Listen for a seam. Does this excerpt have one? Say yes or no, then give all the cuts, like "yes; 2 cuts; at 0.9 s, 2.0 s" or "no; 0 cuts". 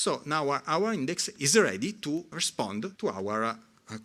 yes; 2 cuts; at 1.3 s, 2.4 s